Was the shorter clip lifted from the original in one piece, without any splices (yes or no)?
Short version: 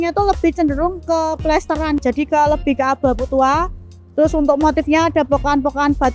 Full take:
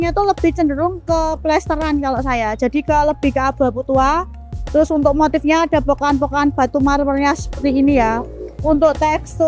no